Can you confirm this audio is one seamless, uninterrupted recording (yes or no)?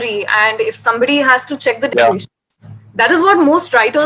no